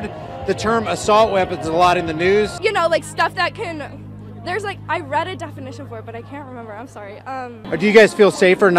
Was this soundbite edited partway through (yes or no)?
yes